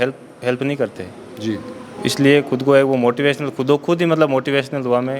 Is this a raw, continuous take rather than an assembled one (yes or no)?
yes